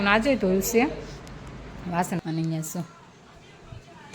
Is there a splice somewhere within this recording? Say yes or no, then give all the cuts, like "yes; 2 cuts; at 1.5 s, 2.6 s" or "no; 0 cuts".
yes; 1 cut; at 2.2 s